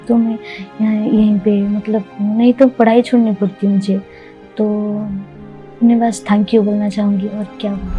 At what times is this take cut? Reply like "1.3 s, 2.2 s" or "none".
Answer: none